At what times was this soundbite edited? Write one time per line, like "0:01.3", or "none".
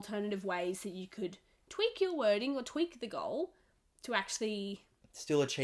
none